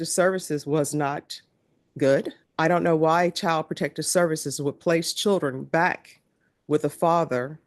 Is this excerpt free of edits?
no; 1 cut; at 2.4 s

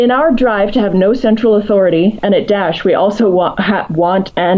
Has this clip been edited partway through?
no; 0 cuts

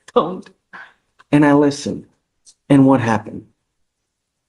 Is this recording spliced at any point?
no; 0 cuts

